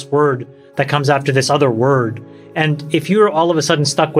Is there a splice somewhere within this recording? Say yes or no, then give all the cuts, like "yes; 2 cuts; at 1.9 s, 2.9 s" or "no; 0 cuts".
no; 0 cuts